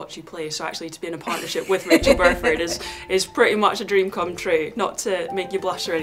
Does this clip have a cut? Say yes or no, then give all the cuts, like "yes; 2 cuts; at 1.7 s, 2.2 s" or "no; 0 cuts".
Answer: no; 0 cuts